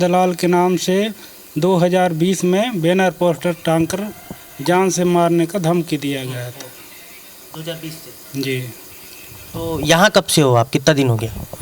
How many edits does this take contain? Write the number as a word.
zero